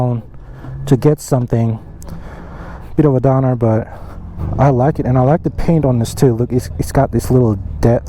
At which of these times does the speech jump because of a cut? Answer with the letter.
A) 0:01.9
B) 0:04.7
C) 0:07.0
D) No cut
D